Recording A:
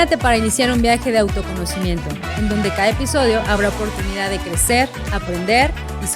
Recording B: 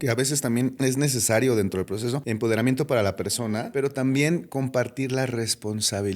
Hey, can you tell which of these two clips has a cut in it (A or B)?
B